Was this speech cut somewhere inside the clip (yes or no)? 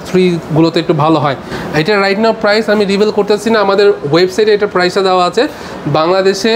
no